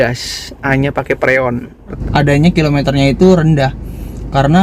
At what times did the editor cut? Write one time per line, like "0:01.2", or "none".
0:02.0